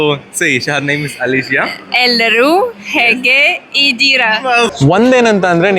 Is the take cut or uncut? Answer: cut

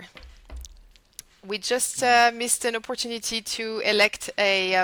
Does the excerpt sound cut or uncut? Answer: uncut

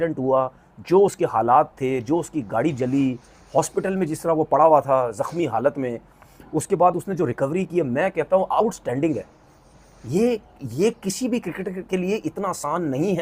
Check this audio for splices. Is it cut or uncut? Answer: uncut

